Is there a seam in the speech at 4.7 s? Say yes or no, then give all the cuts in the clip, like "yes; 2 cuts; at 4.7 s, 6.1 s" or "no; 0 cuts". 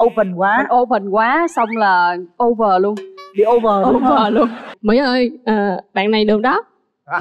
yes; 1 cut; at 4.7 s